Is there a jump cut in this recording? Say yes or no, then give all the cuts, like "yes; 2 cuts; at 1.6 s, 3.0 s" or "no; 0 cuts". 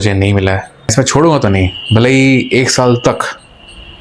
yes; 1 cut; at 0.9 s